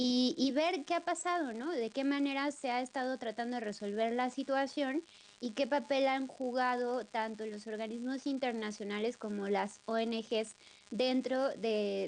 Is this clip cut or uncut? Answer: uncut